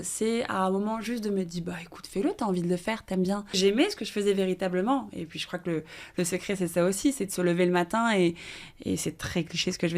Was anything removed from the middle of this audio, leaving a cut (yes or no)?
yes